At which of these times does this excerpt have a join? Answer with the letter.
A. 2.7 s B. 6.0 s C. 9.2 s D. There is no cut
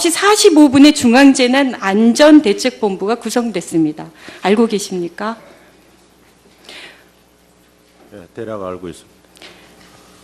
C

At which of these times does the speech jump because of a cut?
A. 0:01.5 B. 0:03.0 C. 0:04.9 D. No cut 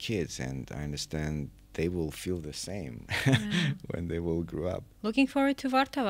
C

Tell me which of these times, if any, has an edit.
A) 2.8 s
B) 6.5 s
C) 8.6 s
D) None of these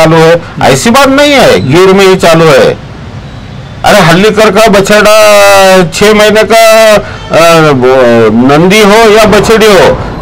D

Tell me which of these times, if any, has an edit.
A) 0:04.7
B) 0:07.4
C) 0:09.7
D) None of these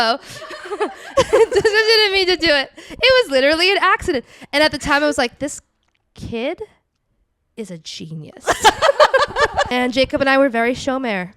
C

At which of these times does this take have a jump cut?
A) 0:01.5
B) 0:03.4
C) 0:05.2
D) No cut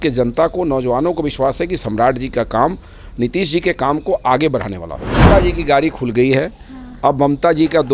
C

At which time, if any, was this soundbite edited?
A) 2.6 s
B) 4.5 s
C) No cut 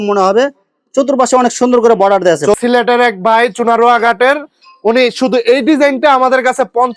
A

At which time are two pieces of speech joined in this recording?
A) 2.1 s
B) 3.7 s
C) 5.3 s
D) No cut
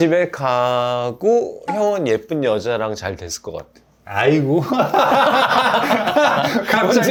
D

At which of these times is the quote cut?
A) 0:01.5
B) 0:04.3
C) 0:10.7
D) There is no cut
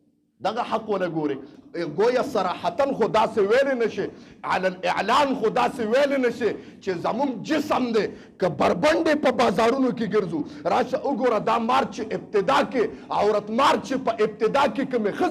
A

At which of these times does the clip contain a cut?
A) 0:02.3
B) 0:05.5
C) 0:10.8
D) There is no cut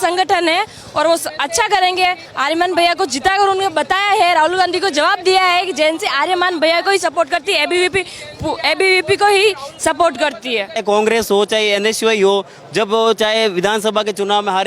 C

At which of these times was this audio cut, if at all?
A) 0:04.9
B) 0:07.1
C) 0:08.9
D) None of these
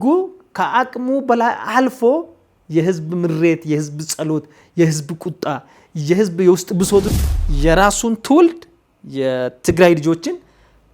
B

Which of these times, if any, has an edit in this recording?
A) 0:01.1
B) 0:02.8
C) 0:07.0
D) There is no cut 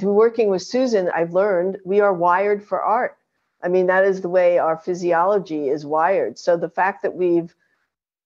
A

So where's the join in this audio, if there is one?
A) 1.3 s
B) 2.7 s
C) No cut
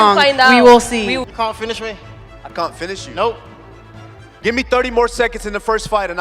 A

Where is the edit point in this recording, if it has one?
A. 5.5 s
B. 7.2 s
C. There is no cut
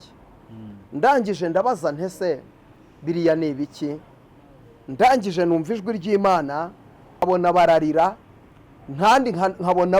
B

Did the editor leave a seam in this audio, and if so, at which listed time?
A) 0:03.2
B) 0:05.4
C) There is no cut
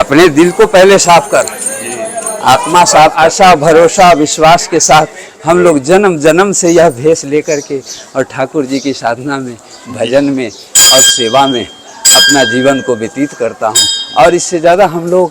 A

